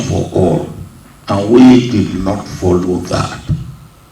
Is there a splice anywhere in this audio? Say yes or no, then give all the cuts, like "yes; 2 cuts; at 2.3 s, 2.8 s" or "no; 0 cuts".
no; 0 cuts